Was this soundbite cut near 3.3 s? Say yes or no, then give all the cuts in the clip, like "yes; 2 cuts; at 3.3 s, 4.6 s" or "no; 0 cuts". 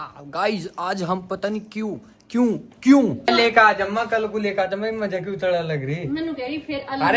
yes; 1 cut; at 3.3 s